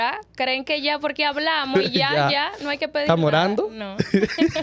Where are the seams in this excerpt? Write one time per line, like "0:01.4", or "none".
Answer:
none